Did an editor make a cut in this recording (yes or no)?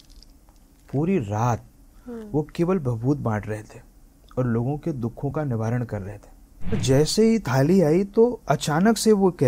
yes